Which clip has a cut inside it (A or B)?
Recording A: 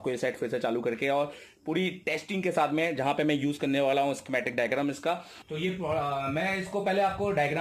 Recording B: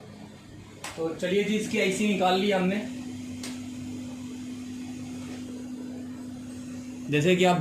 A